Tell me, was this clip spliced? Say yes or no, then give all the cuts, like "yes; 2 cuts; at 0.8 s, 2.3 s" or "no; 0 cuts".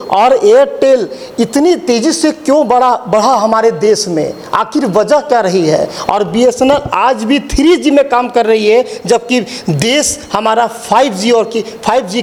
no; 0 cuts